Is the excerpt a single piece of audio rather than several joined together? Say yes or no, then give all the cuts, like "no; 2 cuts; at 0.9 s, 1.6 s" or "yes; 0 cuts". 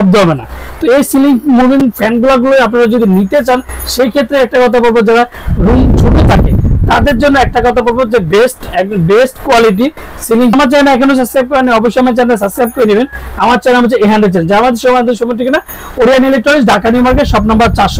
yes; 0 cuts